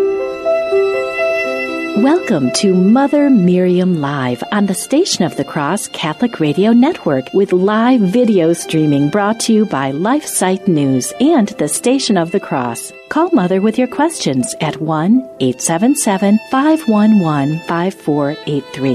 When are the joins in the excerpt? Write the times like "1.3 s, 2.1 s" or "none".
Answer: 1.9 s

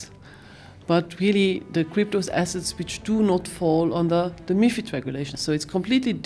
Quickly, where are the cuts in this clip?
5.3 s

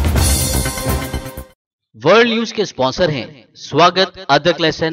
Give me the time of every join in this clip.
1.5 s

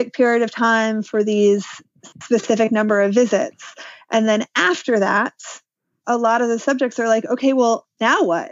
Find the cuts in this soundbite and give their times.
none

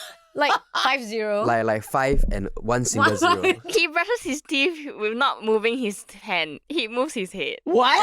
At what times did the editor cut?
3.7 s

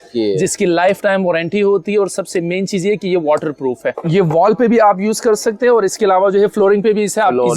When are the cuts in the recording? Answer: 4.0 s

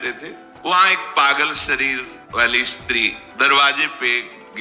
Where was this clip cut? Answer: 0.7 s, 2.2 s, 3.2 s

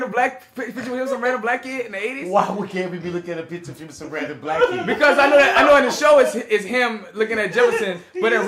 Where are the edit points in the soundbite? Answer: none

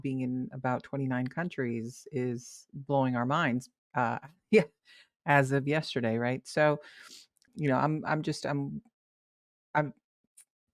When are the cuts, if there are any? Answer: 7.4 s

